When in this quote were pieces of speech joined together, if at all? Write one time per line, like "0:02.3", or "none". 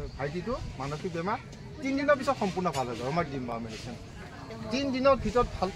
none